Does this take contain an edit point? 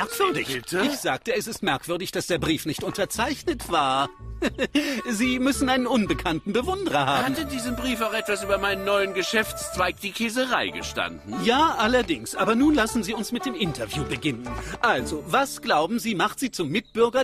yes; 1 cut; at 7.6 s

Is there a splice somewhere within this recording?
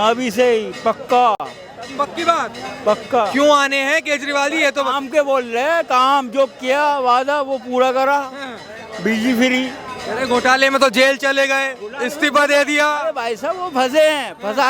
no; 0 cuts

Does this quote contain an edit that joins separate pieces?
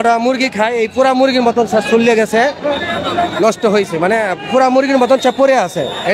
no; 0 cuts

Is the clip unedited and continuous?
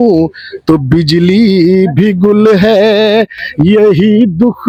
yes; 0 cuts

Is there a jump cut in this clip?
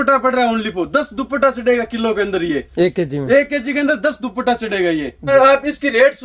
yes; 1 cut; at 5.3 s

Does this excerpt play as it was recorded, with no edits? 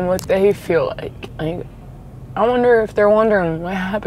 no; 1 cut; at 1.2 s

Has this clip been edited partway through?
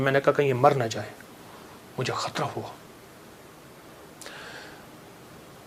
no; 0 cuts

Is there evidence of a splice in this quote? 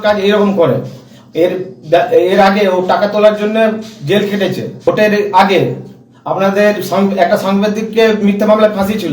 yes; 1 cut; at 4.8 s

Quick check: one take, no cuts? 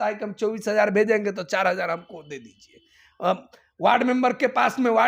yes; 0 cuts

